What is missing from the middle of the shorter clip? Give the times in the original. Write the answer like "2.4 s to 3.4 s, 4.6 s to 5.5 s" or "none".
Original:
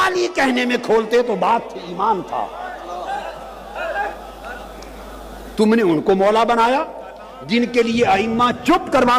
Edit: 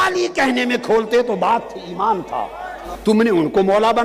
2.8 s to 5.3 s